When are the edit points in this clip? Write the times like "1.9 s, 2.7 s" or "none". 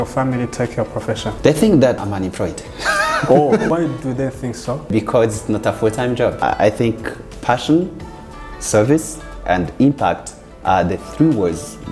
1.3 s, 2.0 s, 4.9 s, 6.4 s